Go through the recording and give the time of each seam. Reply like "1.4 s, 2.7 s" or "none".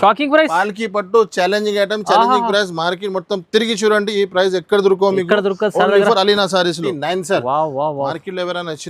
6.9 s